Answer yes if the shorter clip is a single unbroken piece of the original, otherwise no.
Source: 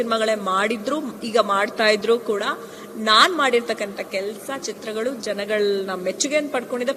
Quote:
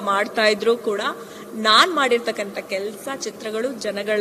yes